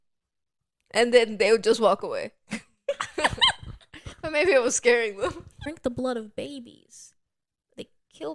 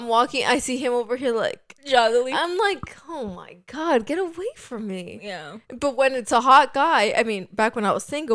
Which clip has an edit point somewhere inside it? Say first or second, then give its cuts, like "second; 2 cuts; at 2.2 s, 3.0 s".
first; 1 cut; at 5.7 s